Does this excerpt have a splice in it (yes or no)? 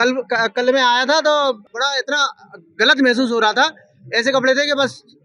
yes